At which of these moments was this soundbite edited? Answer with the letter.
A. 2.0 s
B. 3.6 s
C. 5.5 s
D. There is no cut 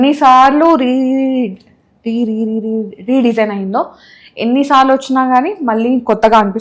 D